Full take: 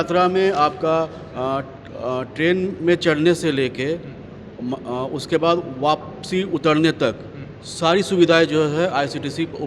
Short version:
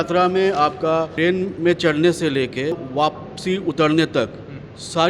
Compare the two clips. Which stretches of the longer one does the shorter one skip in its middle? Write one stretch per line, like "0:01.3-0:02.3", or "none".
0:01.1-0:02.3
0:04.0-0:05.7